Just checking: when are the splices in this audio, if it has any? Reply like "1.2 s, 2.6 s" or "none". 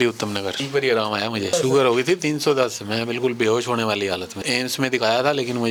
none